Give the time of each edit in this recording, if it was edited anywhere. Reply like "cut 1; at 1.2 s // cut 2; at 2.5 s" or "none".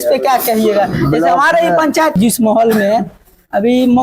cut 1; at 2.1 s